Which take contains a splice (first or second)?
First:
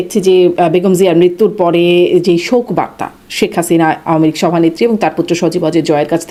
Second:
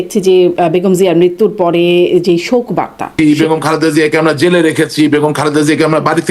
second